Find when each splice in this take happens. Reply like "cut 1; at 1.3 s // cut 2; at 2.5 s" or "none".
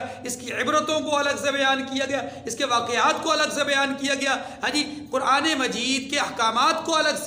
none